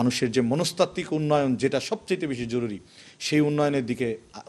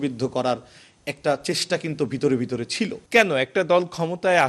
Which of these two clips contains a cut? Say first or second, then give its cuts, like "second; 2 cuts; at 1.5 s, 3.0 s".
second; 1 cut; at 3.0 s